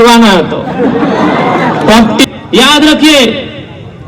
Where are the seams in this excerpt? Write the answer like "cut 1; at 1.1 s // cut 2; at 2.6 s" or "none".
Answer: cut 1; at 2.2 s